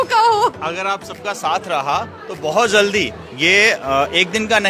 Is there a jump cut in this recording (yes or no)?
no